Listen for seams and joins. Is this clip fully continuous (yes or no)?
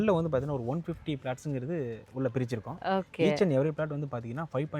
yes